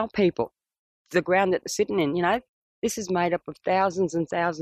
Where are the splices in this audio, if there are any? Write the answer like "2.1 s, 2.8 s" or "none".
none